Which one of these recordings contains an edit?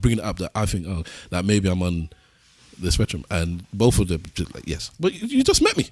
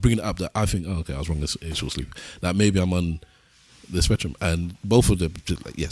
first; 1 cut; at 1.1 s

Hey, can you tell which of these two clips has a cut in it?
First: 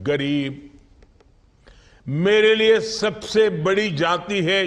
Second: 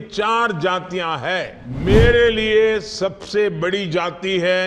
second; 1 cut; at 1.6 s

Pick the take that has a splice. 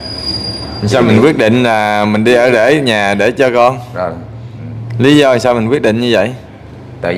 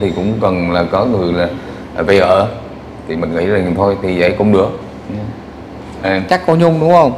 second; 1 cut; at 6.1 s

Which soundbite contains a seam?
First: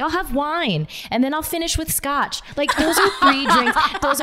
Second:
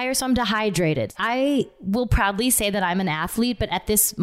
second; 1 cut; at 1.1 s

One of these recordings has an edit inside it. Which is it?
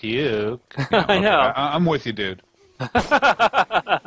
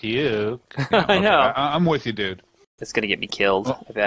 second; 1 cut; at 2.8 s

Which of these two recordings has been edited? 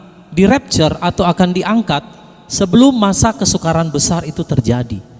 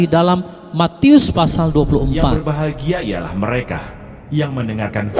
second; 1 cut; at 2.4 s

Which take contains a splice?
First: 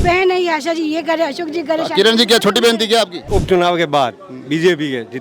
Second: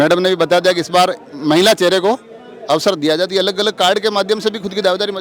first; 1 cut; at 3.3 s

